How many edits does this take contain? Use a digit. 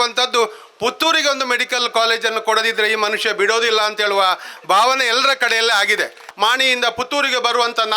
1